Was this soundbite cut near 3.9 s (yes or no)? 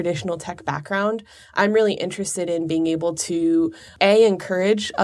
yes